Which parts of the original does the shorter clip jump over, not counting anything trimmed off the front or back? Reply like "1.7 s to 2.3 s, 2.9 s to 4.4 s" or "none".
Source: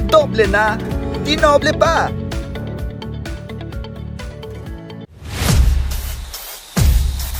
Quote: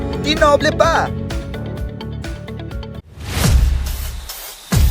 4.1 s to 5.1 s